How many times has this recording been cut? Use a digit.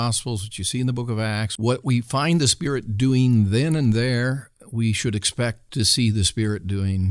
2